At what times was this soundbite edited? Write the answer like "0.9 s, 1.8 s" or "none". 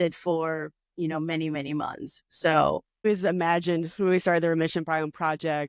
3.1 s

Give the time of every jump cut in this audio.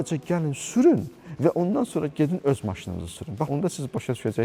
3.5 s

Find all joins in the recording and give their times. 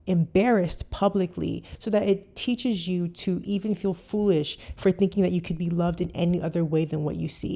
1.7 s

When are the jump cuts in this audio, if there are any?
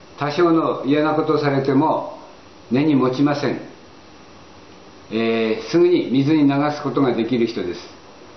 2.9 s

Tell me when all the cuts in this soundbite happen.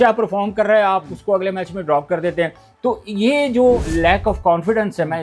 3.9 s

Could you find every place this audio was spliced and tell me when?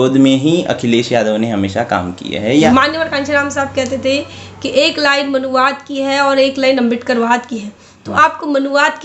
2.7 s

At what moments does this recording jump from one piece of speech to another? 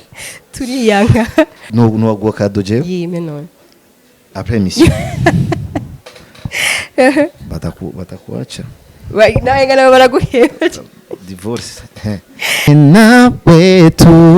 1.6 s, 12.6 s

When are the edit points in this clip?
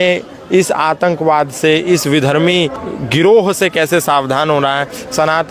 2.8 s

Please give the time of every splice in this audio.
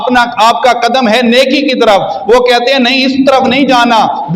none

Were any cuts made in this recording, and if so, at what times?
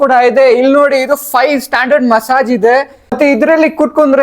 3.2 s

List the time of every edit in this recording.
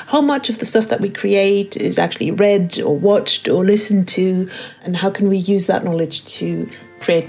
4.7 s

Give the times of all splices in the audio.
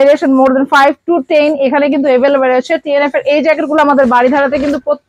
none

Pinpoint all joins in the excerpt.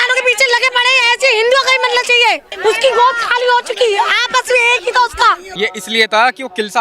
2.5 s, 5.5 s

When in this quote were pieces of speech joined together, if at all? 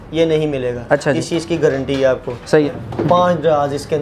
2.7 s

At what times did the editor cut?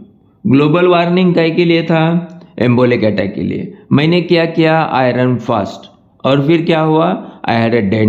none

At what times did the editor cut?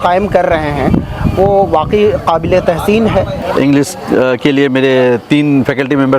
3.3 s

